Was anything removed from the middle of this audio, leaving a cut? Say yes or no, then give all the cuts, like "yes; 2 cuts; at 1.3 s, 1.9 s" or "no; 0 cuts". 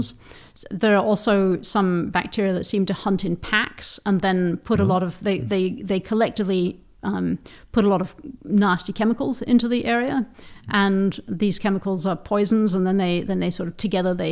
no; 0 cuts